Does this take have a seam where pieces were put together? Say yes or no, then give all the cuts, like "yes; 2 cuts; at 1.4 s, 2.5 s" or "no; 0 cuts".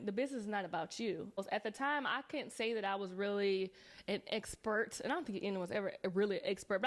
yes; 1 cut; at 1.4 s